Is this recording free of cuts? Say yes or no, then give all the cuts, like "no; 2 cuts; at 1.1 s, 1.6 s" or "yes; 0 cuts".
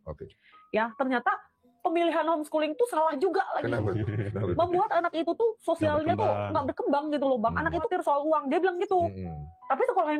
no; 1 cut; at 7.9 s